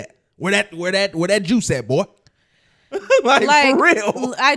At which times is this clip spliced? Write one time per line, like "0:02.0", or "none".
none